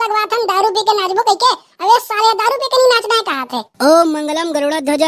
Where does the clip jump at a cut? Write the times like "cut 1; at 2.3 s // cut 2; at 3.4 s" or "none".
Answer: cut 1; at 3.8 s